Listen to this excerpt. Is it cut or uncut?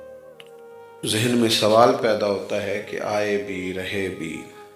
cut